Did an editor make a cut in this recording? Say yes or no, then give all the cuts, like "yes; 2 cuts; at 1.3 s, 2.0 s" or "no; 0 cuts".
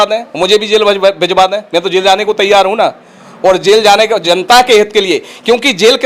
no; 0 cuts